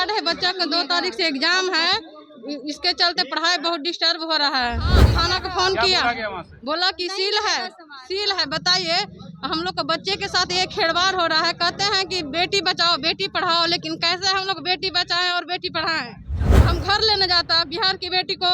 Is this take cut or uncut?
cut